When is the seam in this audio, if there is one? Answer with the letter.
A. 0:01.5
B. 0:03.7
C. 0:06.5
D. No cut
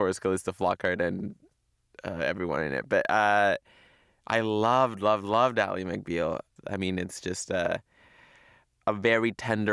C